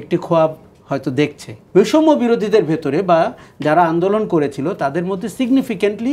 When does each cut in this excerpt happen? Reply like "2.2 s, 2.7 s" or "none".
1.6 s